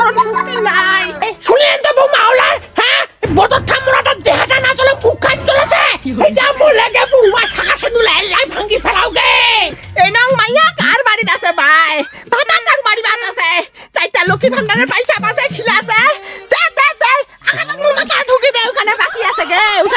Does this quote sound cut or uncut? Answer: cut